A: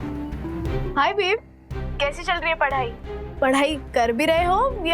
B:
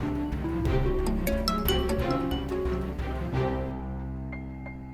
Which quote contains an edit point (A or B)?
A